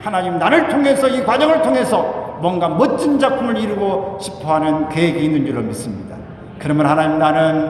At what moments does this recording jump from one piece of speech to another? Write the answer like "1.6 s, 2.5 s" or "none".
none